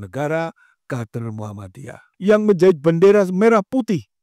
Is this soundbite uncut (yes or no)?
no